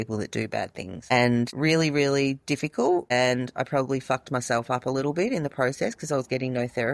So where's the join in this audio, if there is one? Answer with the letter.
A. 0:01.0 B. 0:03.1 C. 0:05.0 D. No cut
B